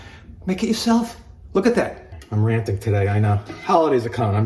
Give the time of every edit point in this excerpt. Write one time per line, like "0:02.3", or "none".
0:02.0